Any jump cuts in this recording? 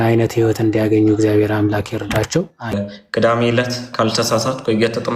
yes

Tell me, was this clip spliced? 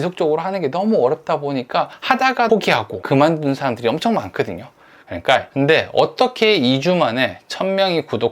yes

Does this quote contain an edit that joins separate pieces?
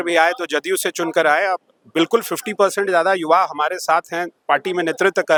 no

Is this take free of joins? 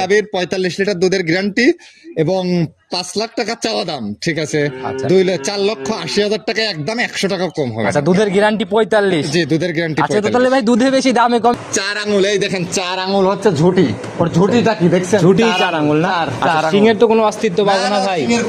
no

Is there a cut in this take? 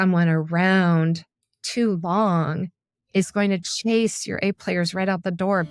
no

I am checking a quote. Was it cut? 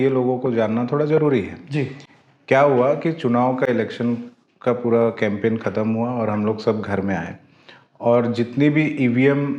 no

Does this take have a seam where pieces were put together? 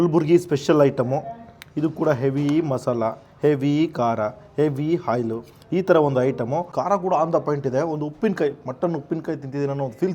yes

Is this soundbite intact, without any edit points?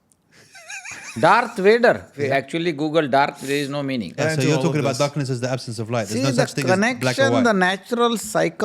no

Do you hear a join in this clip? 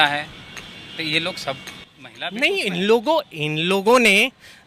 no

